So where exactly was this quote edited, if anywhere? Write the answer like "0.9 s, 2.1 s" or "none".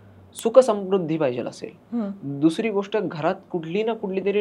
none